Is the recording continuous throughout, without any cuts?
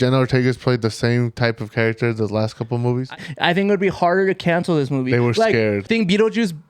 no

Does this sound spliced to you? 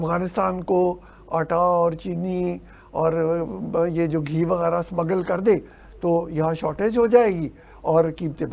no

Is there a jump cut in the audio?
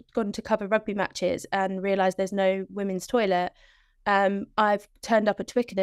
no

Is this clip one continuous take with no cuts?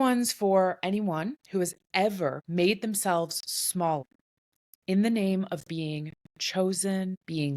no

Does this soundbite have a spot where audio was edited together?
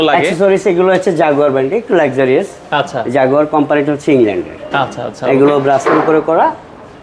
no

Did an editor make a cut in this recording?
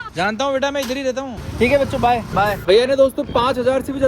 no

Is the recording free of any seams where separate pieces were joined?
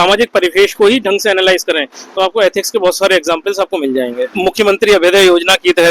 no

